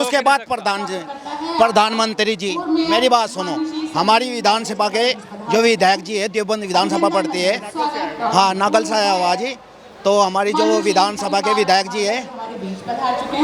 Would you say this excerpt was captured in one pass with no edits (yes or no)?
yes